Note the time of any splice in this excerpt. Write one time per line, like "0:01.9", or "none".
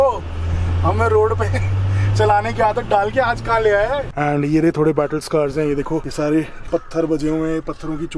0:04.0

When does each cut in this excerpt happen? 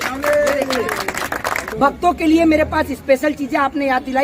0:01.6

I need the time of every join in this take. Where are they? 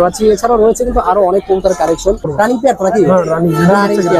0:02.3

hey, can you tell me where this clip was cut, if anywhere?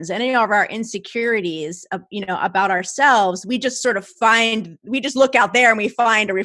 none

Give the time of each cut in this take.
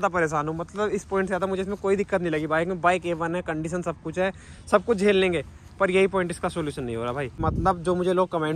0:07.4

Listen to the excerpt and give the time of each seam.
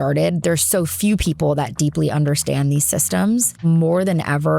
0:03.6

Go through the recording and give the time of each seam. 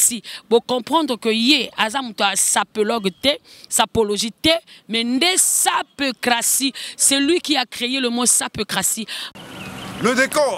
0:09.3

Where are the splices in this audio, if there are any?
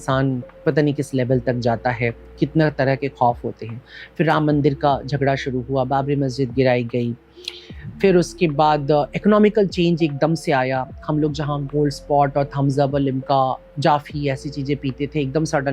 none

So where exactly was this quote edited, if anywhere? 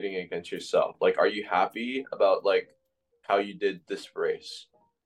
none

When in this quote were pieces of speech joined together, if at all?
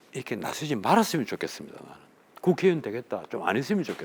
none

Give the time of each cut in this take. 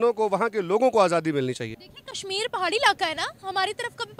0:01.6

